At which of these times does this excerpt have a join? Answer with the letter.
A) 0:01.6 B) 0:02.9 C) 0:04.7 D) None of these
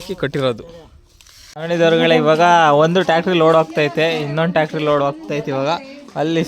A